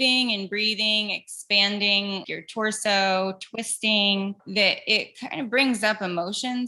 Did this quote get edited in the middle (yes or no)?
yes